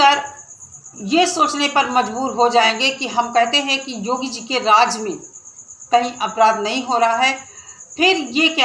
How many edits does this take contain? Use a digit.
1